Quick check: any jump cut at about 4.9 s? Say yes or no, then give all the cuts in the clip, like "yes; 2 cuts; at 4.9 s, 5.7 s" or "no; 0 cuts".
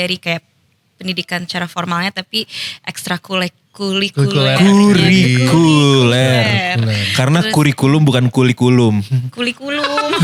no; 0 cuts